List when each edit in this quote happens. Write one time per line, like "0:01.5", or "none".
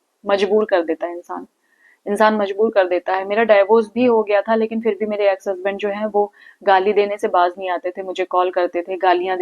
none

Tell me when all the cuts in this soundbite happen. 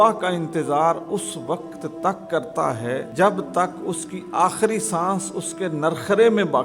0:03.1

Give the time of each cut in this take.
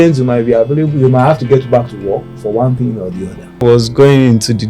0:03.6

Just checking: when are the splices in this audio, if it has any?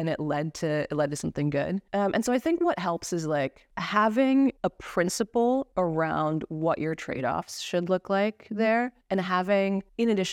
none

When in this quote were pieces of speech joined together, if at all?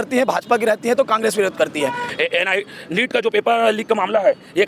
0:02.1

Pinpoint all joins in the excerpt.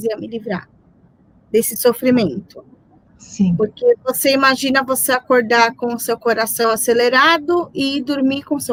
none

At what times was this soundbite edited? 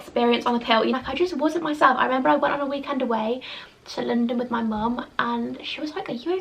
0:00.9

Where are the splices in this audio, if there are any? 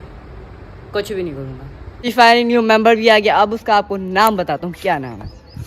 0:02.1

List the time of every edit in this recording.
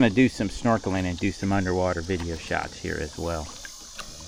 none

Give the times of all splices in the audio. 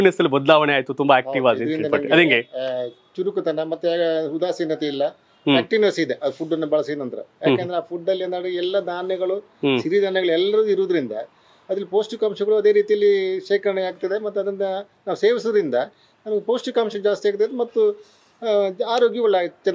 none

